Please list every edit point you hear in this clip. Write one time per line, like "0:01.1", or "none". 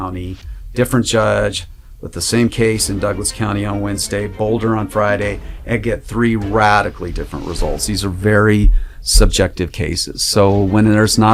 none